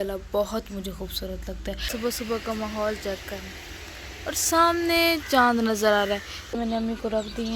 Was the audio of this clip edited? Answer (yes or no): yes